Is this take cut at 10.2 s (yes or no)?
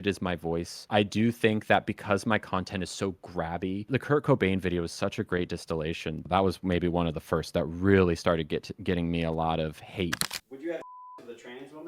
yes